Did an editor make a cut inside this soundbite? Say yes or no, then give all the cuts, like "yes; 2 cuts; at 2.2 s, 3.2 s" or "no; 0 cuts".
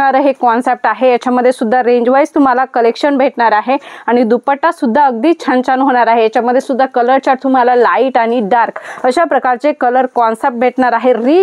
no; 0 cuts